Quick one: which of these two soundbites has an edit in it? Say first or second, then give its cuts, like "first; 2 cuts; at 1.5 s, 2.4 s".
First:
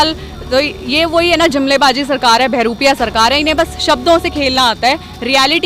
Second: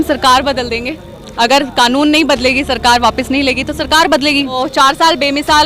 second; 1 cut; at 4.6 s